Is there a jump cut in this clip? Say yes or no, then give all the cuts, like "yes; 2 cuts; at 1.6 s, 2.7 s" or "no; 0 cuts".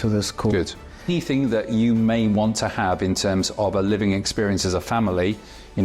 yes; 1 cut; at 1.1 s